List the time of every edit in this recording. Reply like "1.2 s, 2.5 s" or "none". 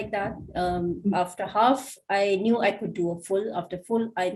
none